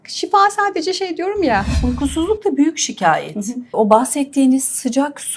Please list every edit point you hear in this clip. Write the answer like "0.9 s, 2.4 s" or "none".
1.7 s, 3.7 s

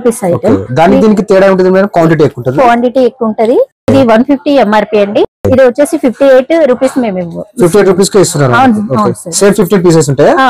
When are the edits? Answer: 3.9 s, 5.4 s

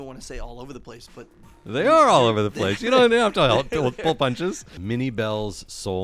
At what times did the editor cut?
4.7 s

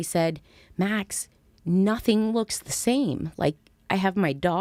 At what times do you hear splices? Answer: none

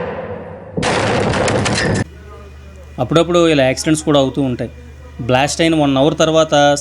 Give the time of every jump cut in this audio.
2.0 s

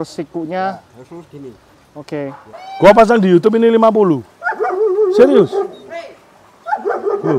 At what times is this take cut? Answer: 2.8 s

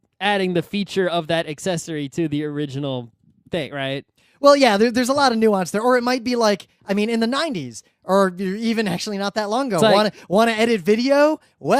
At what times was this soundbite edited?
5.8 s

